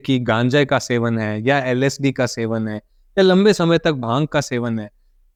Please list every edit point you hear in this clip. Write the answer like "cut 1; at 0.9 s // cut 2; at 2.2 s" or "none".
none